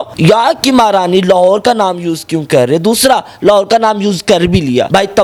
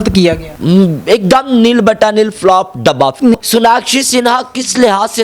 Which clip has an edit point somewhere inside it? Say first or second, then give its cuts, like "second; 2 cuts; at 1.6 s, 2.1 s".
second; 1 cut; at 3.3 s